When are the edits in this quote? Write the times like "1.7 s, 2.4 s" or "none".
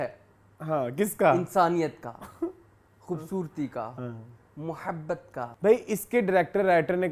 5.5 s